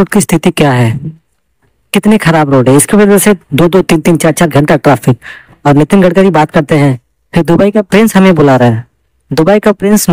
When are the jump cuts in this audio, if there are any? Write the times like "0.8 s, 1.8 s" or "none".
none